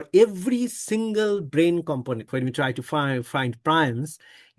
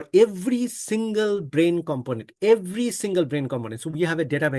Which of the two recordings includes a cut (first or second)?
first